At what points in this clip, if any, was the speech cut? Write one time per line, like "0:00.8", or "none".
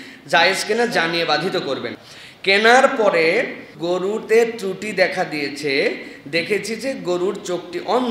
0:02.0
0:03.7